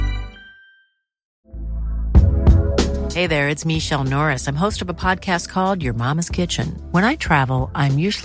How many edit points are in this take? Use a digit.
1